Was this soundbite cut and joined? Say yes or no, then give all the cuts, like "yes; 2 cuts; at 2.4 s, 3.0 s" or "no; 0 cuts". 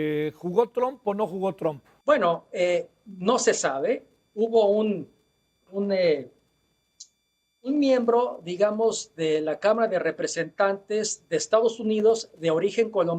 yes; 1 cut; at 1.9 s